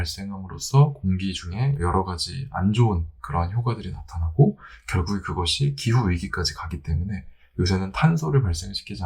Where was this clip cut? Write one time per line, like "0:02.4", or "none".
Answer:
0:01.8